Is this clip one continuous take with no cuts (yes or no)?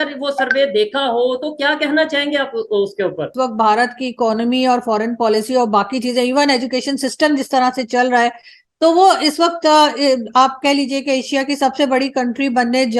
no